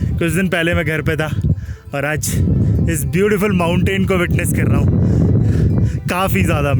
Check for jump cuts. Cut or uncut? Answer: uncut